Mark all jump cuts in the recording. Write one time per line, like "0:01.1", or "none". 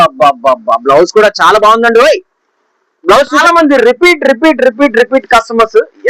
0:03.4